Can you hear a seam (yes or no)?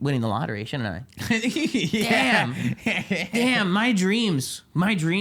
no